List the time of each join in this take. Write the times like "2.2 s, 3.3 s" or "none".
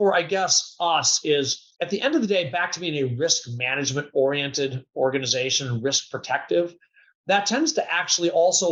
1.6 s